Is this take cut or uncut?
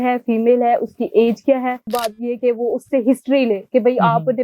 cut